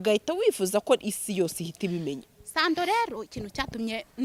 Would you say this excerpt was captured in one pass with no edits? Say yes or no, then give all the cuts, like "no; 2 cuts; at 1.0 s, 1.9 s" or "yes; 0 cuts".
yes; 0 cuts